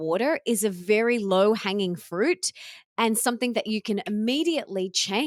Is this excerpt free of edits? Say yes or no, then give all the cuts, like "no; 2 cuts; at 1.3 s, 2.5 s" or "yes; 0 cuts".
yes; 0 cuts